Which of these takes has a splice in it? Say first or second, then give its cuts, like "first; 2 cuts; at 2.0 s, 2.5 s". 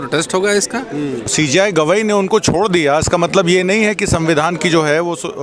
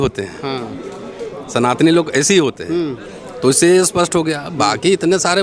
first; 1 cut; at 1.2 s